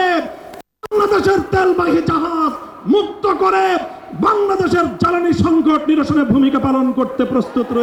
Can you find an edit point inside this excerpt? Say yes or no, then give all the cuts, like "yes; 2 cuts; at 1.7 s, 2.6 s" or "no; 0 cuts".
no; 0 cuts